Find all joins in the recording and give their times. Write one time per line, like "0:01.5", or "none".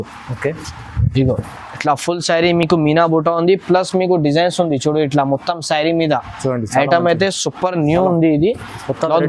none